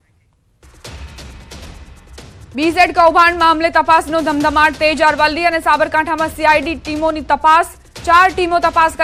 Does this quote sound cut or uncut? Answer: uncut